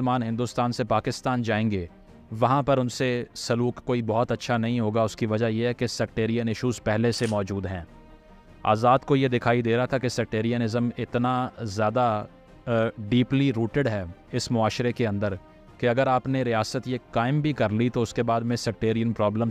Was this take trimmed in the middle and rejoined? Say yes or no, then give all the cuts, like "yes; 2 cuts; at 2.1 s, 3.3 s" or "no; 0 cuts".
no; 0 cuts